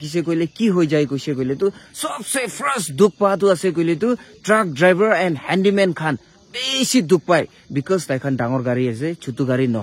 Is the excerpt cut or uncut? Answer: uncut